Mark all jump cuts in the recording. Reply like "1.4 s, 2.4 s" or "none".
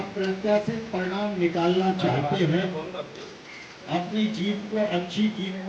none